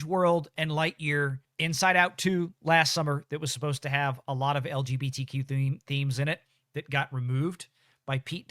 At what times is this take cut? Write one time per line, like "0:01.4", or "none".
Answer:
0:01.5